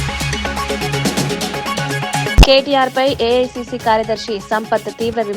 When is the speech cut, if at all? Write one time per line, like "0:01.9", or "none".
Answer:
0:02.3